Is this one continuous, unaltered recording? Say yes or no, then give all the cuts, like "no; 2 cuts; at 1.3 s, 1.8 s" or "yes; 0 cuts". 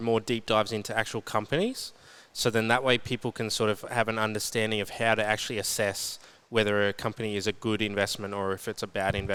yes; 0 cuts